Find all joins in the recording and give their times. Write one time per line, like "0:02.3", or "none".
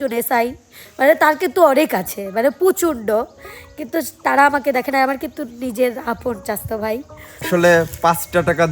0:07.5